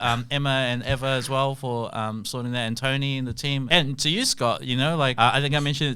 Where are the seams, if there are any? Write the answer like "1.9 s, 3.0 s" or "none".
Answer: 3.7 s, 5.1 s

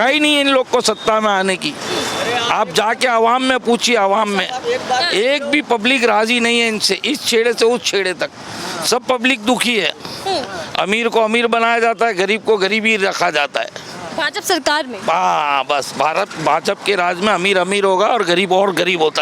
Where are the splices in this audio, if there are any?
none

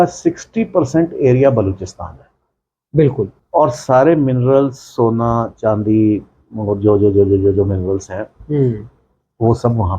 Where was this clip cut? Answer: 3.4 s

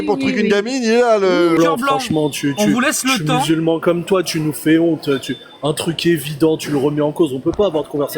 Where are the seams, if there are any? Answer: 1.6 s

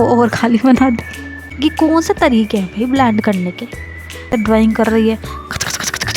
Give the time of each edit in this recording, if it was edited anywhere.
1.6 s, 4.3 s

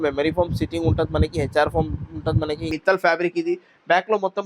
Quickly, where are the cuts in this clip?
2.7 s

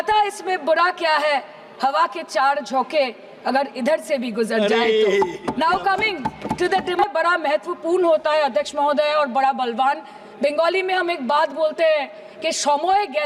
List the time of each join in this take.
7.0 s

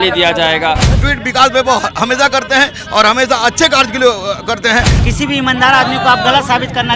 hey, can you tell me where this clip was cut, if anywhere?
1.0 s, 5.0 s

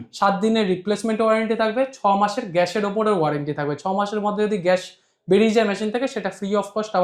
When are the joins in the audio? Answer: none

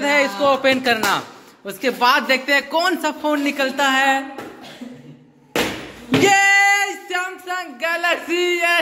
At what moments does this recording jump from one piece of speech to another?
none

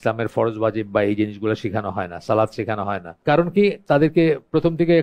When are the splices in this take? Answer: 3.1 s

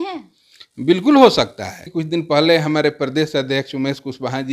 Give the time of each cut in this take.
1.9 s

